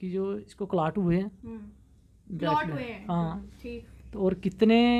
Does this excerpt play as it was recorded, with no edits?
yes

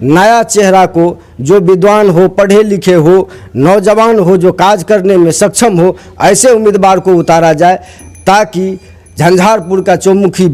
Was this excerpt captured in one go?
yes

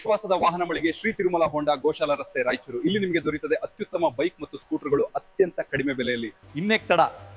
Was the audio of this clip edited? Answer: yes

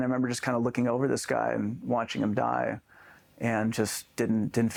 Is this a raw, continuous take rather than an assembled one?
yes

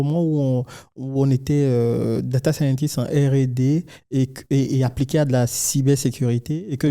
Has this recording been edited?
no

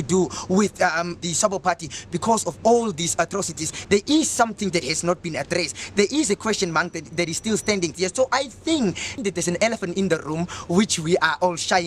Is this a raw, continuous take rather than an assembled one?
no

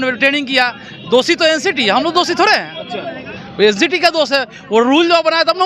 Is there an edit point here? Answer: no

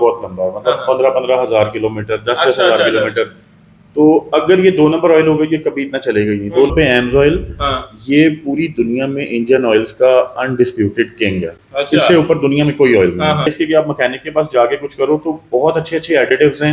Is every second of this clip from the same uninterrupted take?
no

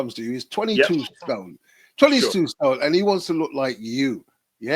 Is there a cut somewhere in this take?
no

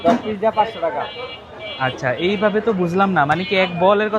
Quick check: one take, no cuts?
yes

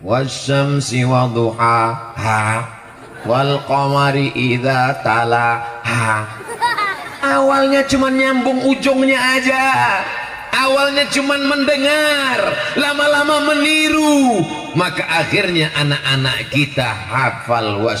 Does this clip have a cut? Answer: no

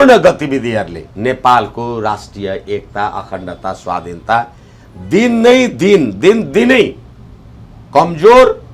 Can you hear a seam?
yes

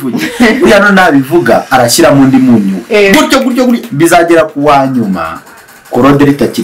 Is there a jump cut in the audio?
no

